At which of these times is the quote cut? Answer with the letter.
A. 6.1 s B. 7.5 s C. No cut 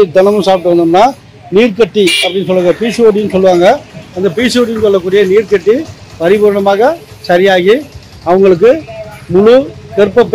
C